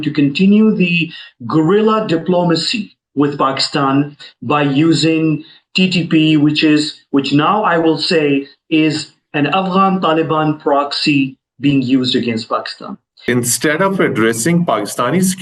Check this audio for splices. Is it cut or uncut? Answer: cut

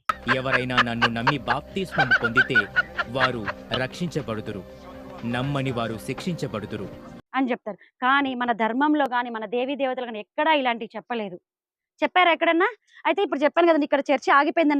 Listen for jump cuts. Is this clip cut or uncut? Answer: uncut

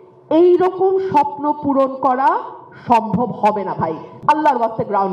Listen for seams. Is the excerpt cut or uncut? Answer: cut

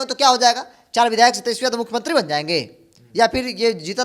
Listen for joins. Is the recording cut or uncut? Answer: uncut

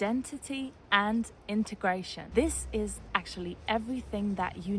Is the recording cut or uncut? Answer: cut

